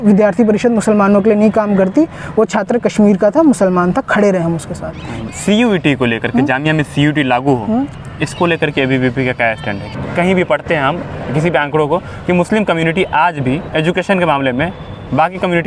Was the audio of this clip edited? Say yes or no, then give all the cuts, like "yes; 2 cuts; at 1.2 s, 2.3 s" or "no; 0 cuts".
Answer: yes; 3 cuts; at 5.2 s, 9.9 s, 13.6 s